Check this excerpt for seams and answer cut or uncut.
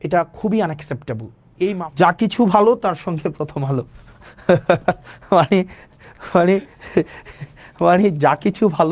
cut